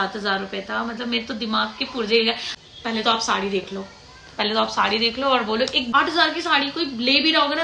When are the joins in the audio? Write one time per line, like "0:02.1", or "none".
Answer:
0:02.5
0:05.9

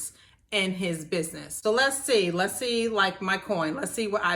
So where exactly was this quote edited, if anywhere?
0:01.4

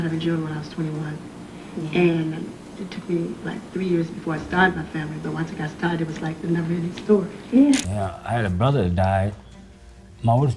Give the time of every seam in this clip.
0:08.0

